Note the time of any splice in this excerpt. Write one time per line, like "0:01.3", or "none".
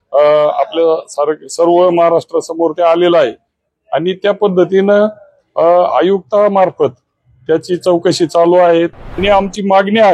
0:09.1